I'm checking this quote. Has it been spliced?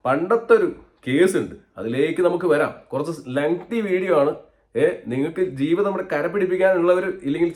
no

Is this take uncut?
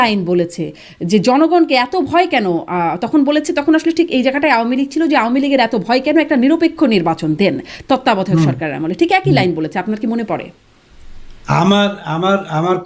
yes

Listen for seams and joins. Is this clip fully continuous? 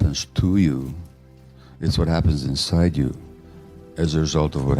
yes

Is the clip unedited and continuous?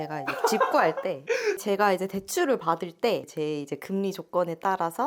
yes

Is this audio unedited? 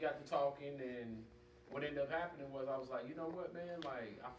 no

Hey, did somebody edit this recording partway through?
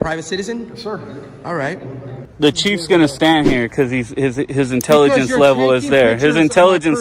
yes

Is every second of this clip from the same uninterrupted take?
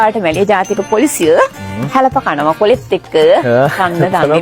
yes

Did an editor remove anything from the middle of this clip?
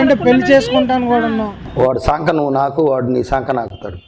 no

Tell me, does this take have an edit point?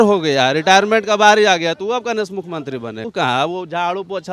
yes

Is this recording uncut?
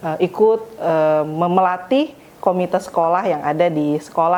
yes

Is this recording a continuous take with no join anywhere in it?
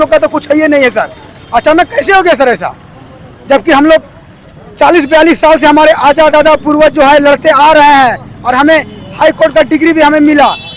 yes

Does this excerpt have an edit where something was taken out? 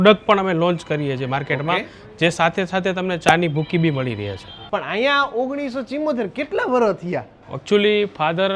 no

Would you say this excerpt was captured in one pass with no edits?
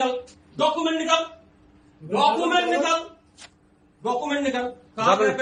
yes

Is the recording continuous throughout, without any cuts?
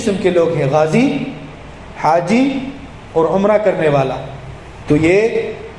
yes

